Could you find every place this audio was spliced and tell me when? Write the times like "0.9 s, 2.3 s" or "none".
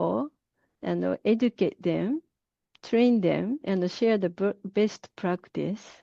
3.6 s